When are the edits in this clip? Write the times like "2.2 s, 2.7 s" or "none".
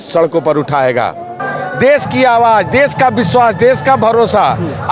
1.4 s